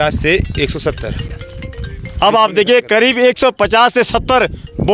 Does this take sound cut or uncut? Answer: uncut